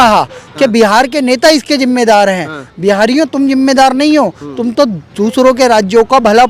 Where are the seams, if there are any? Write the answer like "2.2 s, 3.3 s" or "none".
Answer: none